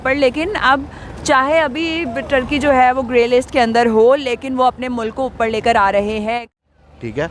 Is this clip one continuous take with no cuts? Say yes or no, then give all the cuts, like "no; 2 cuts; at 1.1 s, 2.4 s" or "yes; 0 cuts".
no; 1 cut; at 6.4 s